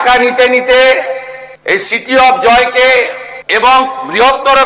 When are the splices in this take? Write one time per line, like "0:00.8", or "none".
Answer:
none